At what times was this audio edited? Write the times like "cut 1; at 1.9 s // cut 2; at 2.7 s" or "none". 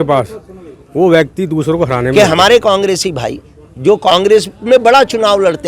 cut 1; at 2.1 s

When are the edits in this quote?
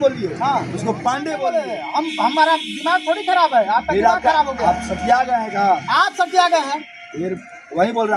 cut 1; at 1.4 s

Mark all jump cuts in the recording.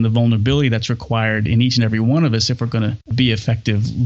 cut 1; at 3.0 s

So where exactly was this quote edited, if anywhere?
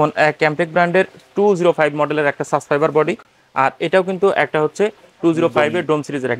none

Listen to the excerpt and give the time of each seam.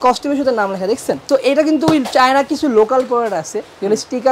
cut 1; at 1.2 s

